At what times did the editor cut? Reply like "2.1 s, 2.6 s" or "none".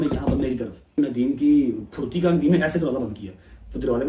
0.9 s